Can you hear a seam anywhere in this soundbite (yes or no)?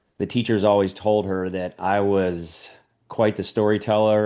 no